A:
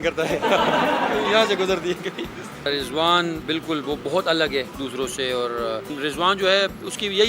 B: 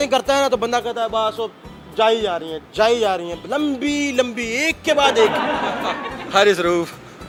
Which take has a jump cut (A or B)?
A